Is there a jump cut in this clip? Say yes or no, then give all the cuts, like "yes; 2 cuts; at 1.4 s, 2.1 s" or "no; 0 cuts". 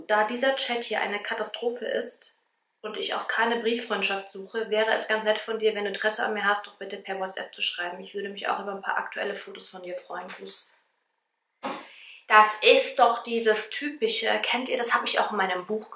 no; 0 cuts